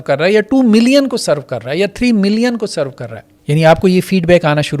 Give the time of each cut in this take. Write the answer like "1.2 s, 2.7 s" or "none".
3.3 s